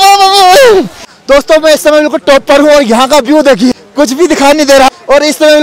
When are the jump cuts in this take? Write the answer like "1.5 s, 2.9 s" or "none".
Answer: 1.1 s, 3.8 s, 4.9 s